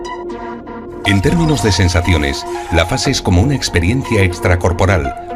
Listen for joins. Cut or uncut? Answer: cut